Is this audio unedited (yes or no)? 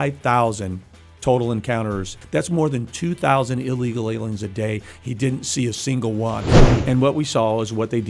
no